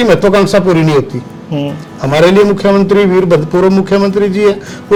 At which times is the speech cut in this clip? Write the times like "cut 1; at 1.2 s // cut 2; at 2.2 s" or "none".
none

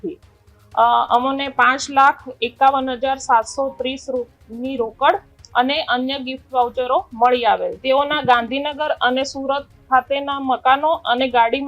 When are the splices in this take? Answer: cut 1; at 7.7 s

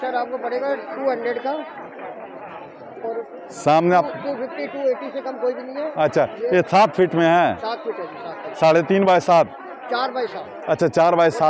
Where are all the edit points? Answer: none

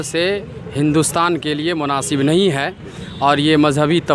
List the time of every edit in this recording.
none

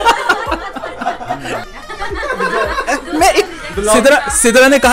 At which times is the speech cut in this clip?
cut 1; at 1.6 s

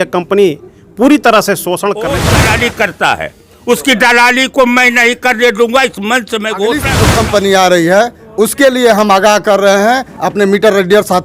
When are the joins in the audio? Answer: cut 1; at 2.2 s // cut 2; at 7.0 s

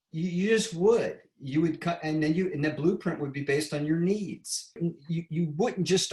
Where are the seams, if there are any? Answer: cut 1; at 4.8 s

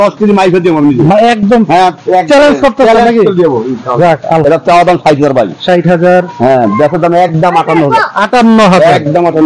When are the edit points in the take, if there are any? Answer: cut 1; at 4.4 s

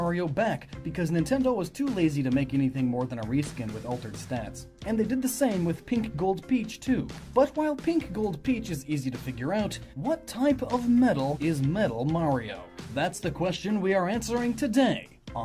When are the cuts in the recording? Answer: cut 1; at 13.1 s

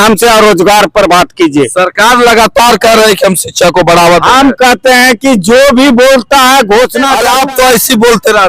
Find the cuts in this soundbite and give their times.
cut 1; at 7.2 s

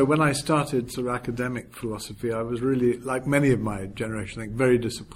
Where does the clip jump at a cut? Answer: none

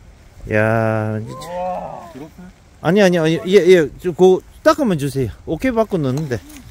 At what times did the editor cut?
none

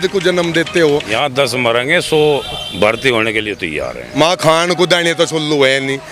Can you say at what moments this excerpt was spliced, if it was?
cut 1; at 1.1 s // cut 2; at 4.0 s

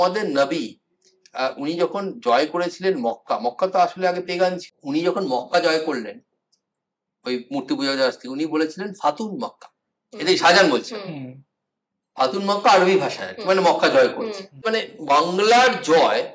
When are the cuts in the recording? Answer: cut 1; at 4.7 s // cut 2; at 14.9 s

